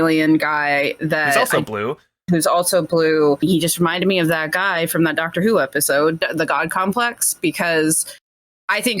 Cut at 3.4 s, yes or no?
yes